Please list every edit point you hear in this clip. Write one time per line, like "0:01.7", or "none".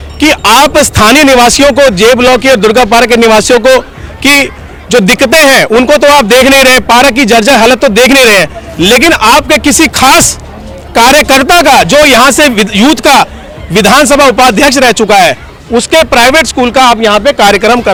none

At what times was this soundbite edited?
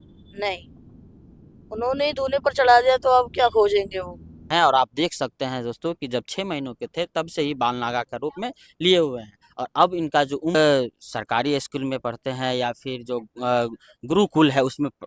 0:04.5
0:10.5

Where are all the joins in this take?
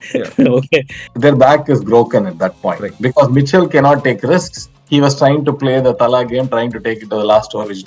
0:01.0

